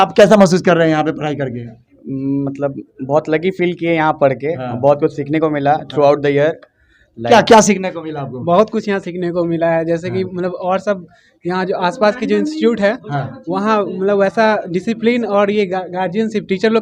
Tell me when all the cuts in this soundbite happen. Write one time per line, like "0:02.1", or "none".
none